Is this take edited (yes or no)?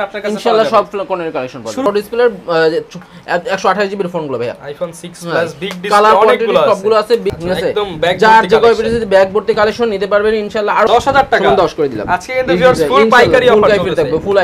yes